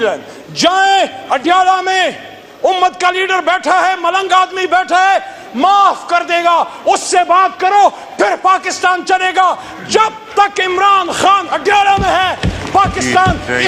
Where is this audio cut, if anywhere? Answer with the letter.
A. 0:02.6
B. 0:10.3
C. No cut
C